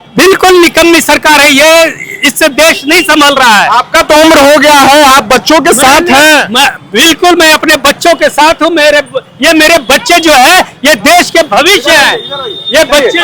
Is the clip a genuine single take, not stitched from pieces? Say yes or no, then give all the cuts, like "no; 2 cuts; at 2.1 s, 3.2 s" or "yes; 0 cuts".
yes; 0 cuts